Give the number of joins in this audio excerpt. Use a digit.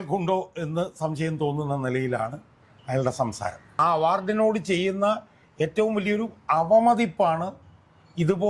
1